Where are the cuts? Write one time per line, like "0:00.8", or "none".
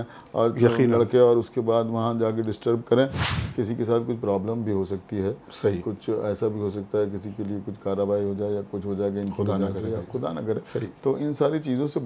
0:03.3